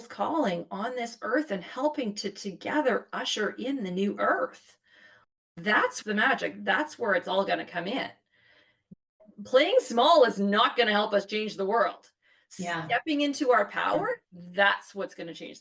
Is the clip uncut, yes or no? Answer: yes